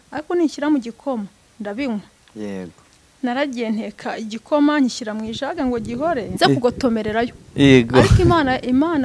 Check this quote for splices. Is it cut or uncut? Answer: cut